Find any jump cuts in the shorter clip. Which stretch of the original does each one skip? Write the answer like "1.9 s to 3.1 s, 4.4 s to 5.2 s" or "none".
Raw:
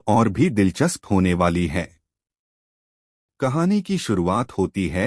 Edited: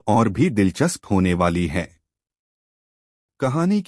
none